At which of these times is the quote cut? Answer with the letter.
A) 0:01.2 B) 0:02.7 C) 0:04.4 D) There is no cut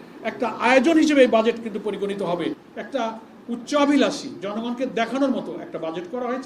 B